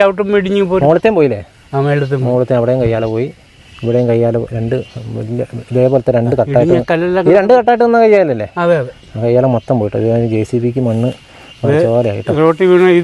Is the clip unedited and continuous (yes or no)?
yes